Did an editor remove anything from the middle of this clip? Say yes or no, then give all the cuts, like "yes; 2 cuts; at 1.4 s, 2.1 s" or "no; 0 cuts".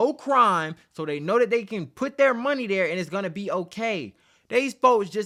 no; 0 cuts